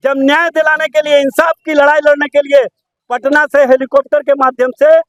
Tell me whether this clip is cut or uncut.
uncut